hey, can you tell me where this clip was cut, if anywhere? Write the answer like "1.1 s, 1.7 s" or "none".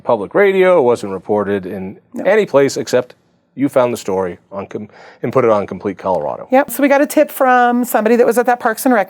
6.7 s